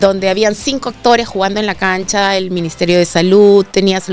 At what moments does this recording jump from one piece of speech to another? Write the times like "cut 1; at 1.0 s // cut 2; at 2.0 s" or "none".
none